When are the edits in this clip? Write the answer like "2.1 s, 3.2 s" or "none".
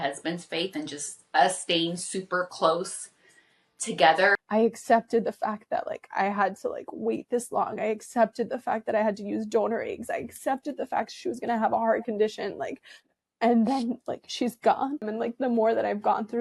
4.3 s, 15.1 s